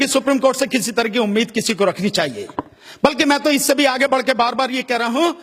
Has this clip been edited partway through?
no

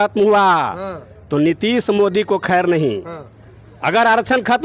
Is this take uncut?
yes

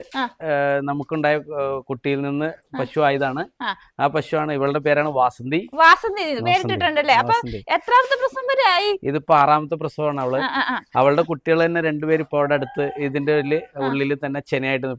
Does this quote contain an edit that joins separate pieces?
no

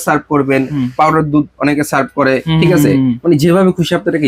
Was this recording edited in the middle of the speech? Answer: no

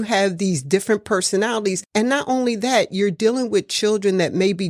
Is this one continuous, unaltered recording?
no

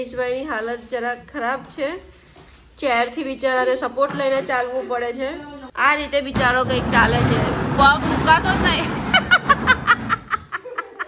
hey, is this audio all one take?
yes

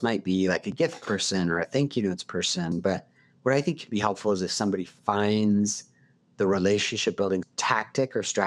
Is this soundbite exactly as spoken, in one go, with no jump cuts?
no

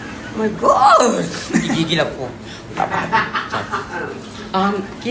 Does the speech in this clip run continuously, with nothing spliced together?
yes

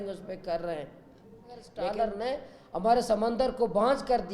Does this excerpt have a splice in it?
yes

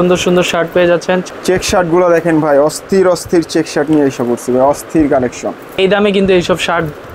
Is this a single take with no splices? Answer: no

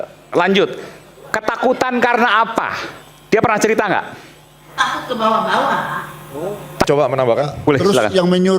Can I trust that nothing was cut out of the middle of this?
no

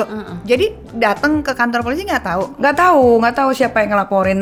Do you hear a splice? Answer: no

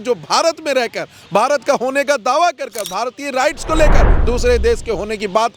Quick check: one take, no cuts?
yes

